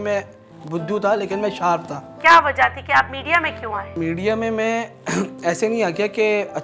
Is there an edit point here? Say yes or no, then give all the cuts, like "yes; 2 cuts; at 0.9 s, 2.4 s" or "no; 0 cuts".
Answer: yes; 2 cuts; at 2.1 s, 3.9 s